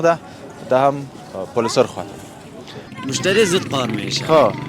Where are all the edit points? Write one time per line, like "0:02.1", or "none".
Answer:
0:03.0